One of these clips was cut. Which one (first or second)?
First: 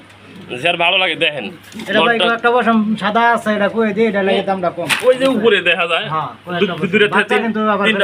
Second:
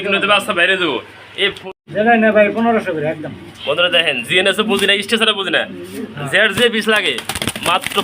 second